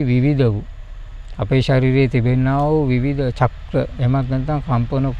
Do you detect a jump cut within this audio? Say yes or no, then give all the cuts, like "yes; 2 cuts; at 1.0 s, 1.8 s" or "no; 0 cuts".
no; 0 cuts